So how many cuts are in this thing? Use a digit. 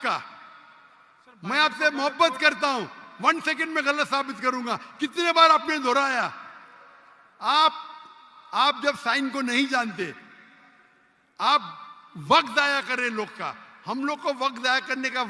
0